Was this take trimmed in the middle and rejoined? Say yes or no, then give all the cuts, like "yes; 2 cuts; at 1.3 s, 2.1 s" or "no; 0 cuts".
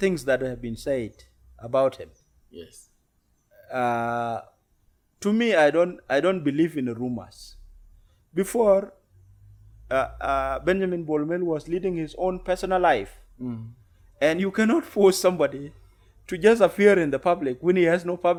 no; 0 cuts